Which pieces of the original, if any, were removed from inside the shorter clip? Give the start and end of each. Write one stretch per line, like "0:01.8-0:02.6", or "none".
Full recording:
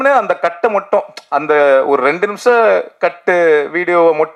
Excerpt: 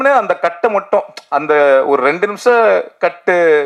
none